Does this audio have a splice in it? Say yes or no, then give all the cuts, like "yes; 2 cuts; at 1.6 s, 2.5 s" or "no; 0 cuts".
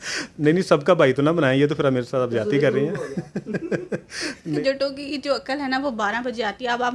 yes; 1 cut; at 4.5 s